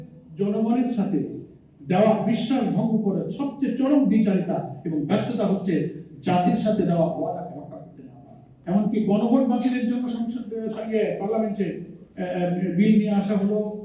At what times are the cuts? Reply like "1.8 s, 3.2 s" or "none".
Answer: 8.5 s